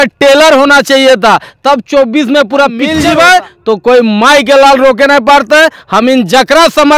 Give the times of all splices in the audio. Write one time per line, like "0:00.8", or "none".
0:02.9